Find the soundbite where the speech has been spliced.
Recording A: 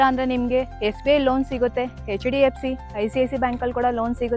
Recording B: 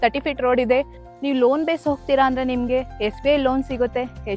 B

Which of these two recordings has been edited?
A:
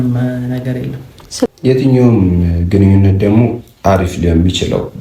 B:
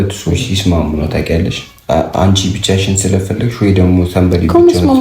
A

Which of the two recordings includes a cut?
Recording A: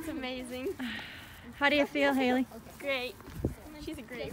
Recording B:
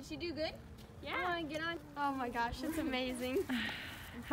B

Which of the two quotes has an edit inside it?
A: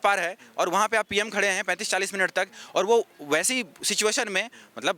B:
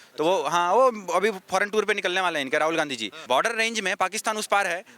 B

